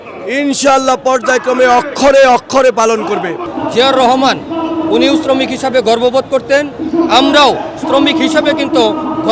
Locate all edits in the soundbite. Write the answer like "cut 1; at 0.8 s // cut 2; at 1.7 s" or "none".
cut 1; at 3.5 s